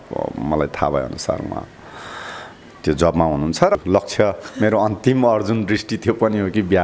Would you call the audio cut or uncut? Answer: cut